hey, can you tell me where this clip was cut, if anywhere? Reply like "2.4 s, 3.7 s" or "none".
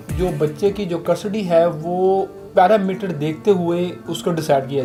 none